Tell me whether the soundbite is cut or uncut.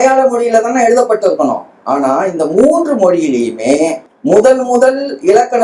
cut